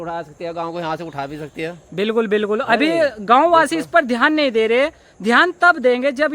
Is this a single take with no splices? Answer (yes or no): yes